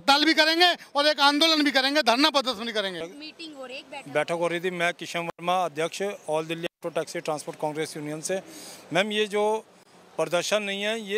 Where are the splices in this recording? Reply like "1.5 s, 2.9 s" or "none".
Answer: none